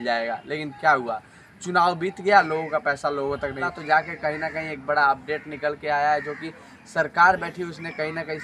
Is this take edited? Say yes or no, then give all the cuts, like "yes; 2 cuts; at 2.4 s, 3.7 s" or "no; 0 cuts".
yes; 1 cut; at 3.7 s